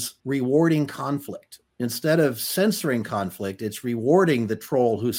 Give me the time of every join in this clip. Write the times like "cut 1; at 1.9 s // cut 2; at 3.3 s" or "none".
none